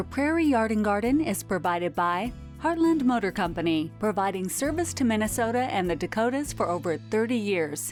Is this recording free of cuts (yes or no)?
yes